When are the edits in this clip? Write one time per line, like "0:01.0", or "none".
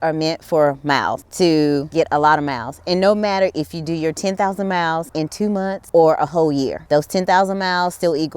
0:01.2
0:01.9
0:05.4
0:06.8